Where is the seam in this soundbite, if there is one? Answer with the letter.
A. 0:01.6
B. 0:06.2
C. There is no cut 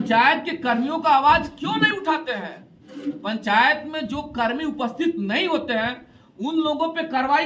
C